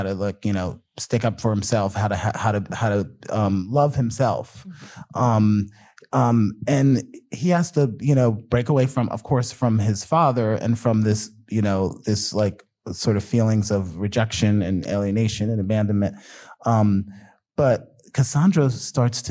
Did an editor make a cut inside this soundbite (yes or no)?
no